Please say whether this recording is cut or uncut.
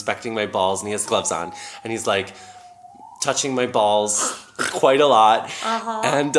cut